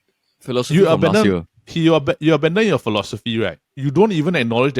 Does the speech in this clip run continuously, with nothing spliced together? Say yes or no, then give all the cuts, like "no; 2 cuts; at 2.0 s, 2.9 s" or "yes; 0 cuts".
no; 1 cut; at 3.7 s